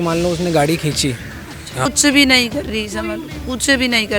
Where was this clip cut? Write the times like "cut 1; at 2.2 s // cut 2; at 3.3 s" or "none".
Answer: cut 1; at 1.9 s